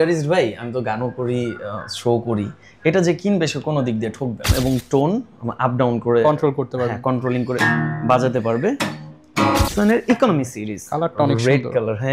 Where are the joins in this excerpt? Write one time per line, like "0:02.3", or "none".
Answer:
0:04.5
0:09.7